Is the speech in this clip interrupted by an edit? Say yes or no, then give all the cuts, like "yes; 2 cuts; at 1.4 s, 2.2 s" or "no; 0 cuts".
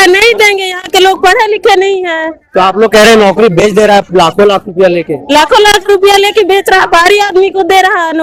no; 0 cuts